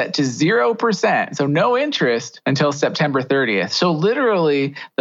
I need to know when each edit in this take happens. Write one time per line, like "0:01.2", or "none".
0:02.3